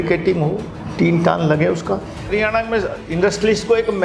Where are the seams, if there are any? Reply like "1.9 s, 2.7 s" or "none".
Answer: 2.2 s